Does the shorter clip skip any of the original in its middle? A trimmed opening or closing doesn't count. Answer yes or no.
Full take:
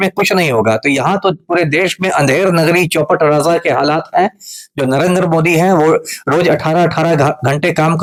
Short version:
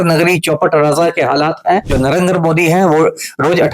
yes